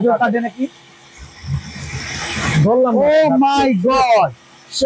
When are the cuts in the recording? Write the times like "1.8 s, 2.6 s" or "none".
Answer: none